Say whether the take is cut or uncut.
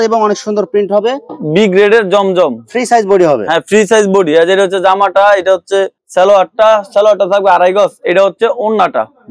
uncut